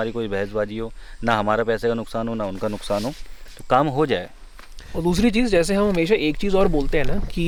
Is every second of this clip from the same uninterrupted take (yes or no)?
yes